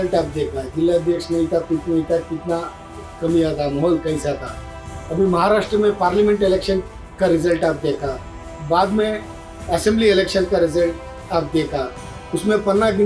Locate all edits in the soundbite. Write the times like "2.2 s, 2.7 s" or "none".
none

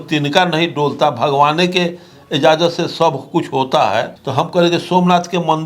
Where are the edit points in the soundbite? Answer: 4.2 s

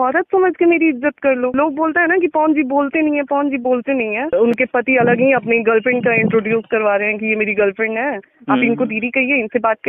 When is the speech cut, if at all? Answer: 1.5 s, 4.3 s

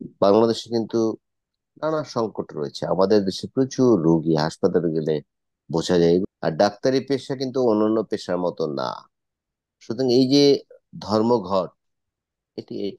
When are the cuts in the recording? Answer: 6.2 s

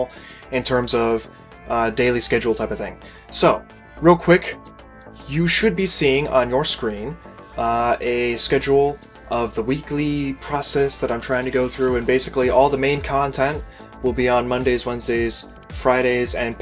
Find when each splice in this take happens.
none

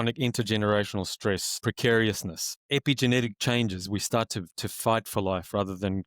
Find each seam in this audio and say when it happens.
1.6 s, 2.6 s

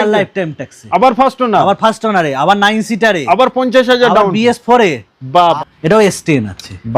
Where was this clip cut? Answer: 5.6 s

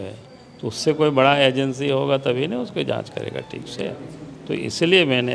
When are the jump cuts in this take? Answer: none

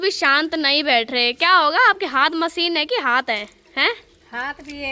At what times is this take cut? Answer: none

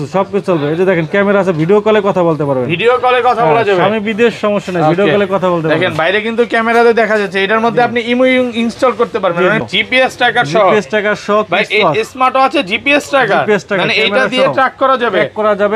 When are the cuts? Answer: 9.7 s

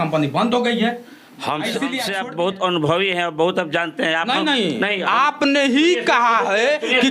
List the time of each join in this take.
2.1 s

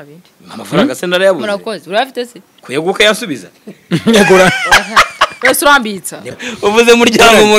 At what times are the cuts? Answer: 6.3 s

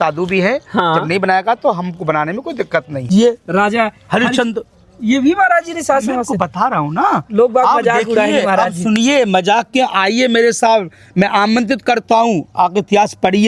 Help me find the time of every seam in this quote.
3.0 s

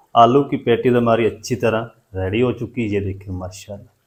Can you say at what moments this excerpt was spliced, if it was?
none

